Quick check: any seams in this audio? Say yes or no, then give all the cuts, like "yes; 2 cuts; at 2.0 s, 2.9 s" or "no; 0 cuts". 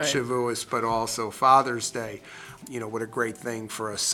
no; 0 cuts